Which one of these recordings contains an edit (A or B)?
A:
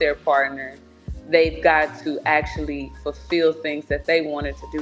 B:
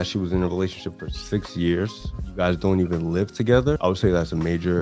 B